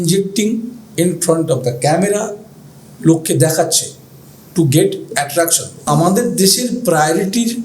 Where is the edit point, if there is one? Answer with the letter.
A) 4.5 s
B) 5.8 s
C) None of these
B